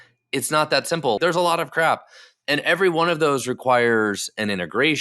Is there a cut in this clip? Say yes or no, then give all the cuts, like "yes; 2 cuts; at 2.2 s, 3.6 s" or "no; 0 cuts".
yes; 1 cut; at 1.2 s